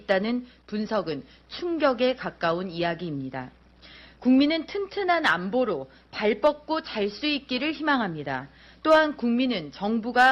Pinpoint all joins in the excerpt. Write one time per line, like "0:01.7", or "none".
0:05.7